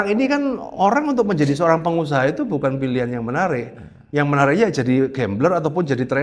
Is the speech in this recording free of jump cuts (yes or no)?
yes